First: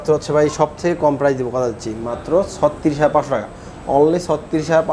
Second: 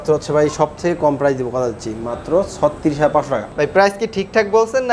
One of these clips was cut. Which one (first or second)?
second